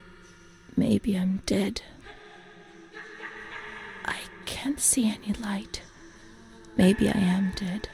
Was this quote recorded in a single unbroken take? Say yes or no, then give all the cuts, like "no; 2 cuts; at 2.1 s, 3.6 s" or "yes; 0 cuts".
yes; 0 cuts